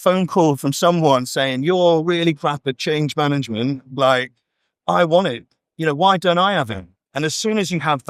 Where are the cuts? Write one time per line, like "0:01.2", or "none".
none

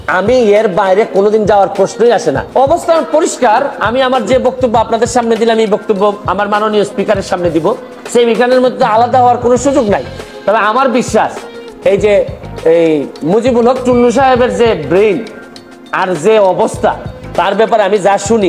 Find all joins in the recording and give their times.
0:02.4

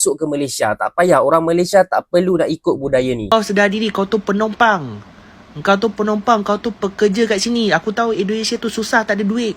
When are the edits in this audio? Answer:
0:03.3

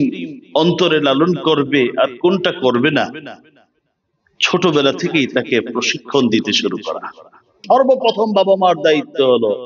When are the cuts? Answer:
0:07.6

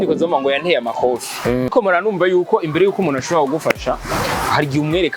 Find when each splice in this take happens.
0:01.7

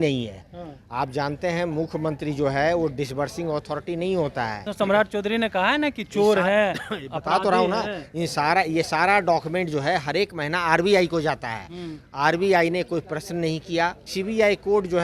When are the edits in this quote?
0:04.7
0:14.1

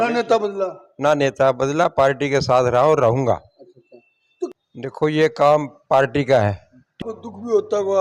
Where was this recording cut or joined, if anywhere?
0:04.5
0:07.0

